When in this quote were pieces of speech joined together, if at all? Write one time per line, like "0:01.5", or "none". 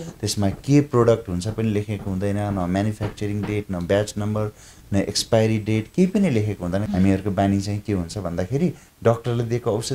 0:06.9